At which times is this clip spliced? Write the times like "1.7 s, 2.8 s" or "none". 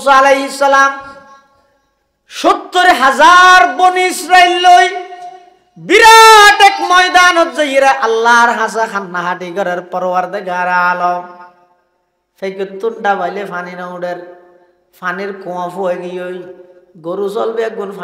none